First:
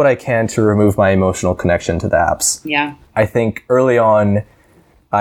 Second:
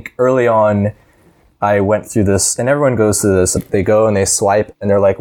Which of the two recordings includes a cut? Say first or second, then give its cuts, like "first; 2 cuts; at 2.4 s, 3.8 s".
second; 1 cut; at 3.6 s